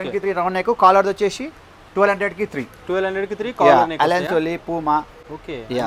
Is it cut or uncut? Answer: uncut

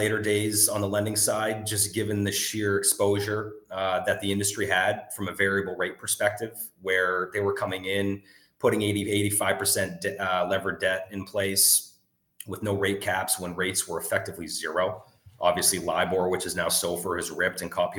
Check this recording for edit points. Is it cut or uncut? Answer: uncut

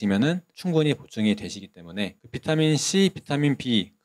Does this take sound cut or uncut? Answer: cut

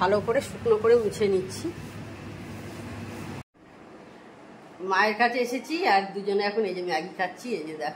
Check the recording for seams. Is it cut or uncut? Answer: cut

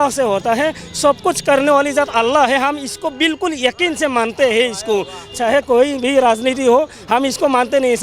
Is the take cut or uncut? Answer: uncut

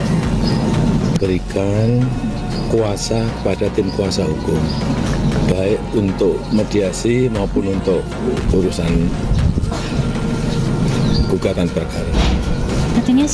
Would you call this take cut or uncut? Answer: uncut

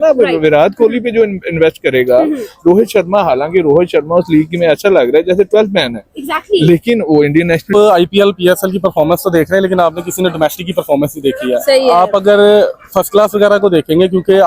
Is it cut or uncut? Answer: cut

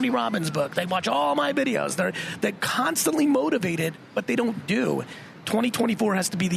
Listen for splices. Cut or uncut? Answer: uncut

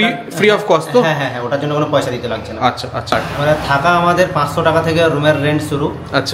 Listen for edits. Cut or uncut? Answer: cut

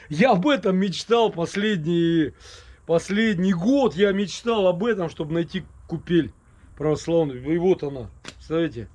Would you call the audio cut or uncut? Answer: uncut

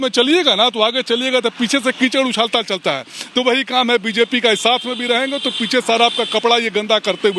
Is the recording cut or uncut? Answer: uncut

